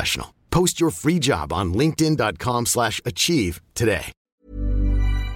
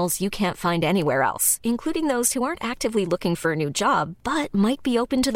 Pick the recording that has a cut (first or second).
first